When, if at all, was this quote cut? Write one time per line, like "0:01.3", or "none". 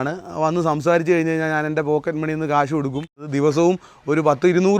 0:03.2